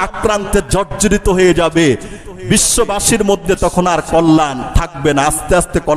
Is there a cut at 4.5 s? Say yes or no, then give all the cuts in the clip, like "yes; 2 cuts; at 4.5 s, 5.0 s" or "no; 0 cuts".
no; 0 cuts